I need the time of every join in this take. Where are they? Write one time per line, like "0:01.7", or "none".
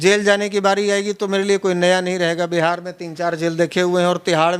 none